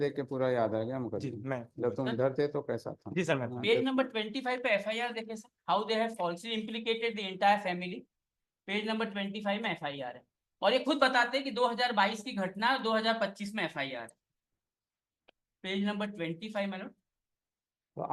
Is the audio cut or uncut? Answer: uncut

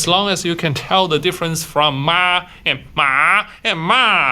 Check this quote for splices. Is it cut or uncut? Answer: uncut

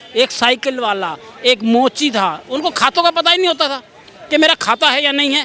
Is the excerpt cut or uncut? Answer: uncut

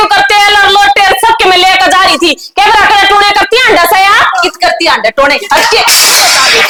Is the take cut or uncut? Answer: uncut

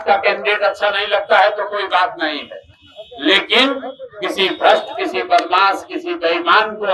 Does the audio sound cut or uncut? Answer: uncut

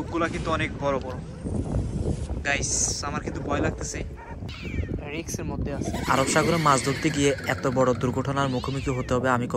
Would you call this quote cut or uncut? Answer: cut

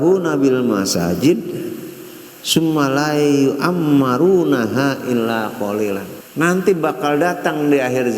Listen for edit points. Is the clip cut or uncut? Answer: cut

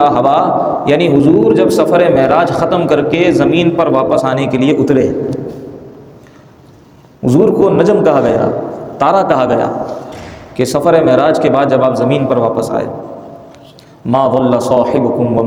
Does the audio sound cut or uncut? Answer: uncut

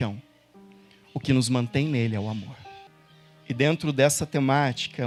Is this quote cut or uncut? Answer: uncut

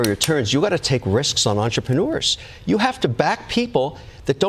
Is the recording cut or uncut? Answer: uncut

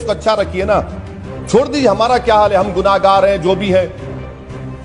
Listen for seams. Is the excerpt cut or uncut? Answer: uncut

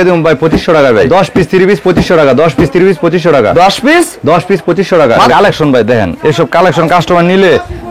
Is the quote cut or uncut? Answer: cut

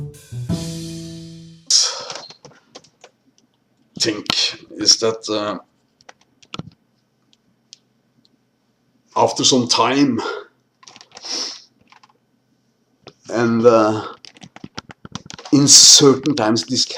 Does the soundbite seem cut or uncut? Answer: uncut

